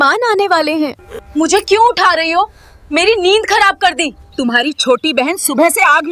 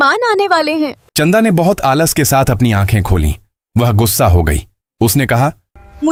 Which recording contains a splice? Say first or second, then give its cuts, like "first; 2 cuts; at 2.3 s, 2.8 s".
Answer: first; 2 cuts; at 1.0 s, 4.2 s